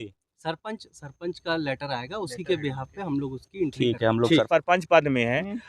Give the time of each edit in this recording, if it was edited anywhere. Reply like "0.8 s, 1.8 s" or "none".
4.4 s